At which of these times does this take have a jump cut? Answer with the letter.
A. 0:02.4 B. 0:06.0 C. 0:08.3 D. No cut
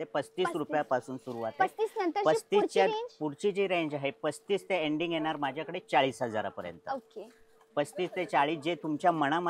D